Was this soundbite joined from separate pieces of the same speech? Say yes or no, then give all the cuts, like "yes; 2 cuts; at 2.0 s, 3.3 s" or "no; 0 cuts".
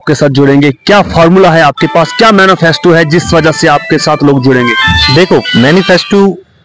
no; 0 cuts